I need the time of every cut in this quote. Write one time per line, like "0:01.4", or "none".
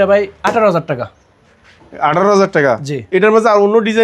none

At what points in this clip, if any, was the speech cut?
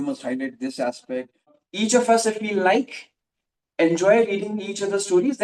0:01.6

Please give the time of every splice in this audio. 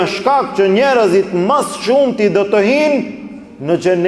none

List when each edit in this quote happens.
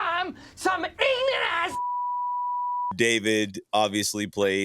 0:02.9

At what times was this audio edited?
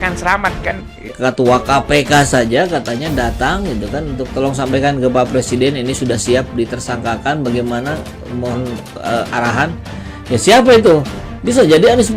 0:01.1

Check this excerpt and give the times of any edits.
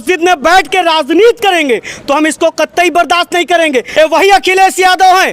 0:03.9

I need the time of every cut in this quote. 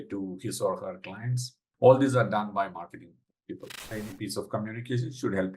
0:03.9

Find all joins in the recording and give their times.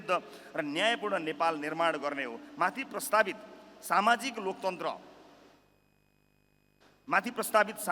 none

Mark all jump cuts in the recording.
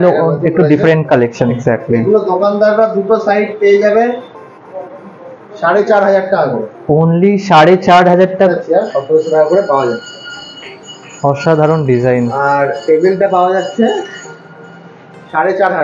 0:01.6
0:08.5

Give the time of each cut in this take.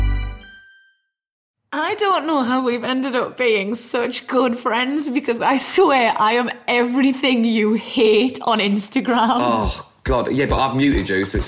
0:01.5

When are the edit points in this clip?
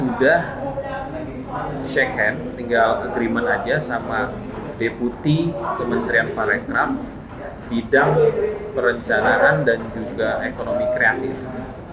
none

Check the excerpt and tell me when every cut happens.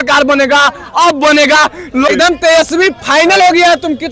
0:02.1

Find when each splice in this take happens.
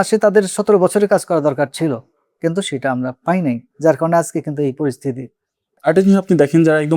0:05.7

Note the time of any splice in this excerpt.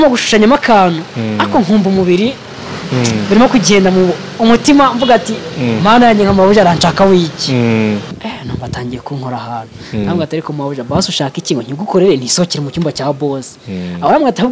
0:08.2

